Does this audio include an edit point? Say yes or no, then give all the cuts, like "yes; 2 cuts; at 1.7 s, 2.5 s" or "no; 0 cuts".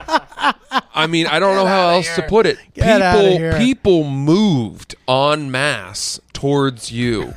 no; 0 cuts